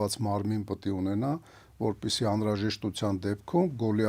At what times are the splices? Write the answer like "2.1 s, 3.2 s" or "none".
none